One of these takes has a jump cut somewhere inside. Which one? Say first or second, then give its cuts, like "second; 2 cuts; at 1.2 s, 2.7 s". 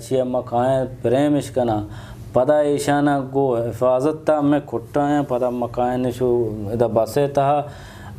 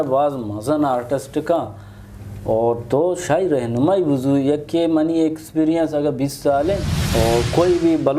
second; 1 cut; at 6.9 s